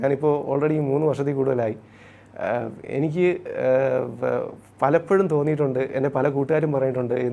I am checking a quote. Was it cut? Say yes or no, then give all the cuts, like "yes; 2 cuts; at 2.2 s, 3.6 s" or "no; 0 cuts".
no; 0 cuts